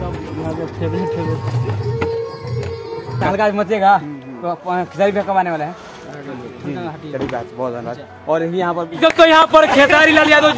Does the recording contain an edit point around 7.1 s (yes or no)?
no